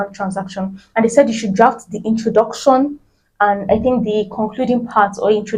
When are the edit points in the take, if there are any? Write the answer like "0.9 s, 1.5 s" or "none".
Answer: none